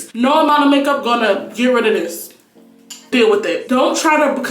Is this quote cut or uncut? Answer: cut